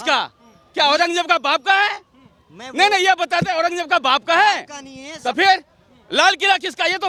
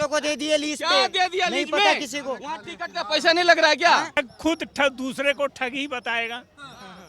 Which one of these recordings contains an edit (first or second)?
second